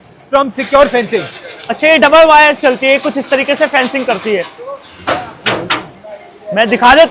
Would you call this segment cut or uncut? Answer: uncut